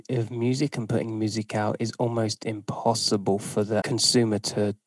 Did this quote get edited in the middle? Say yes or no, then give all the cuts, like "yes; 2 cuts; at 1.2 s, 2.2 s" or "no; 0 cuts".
yes; 1 cut; at 3.9 s